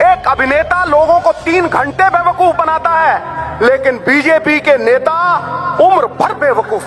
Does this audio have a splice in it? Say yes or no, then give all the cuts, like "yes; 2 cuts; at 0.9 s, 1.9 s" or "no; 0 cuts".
no; 0 cuts